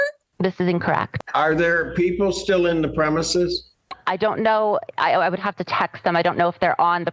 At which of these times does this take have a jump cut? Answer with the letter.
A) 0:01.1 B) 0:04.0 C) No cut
A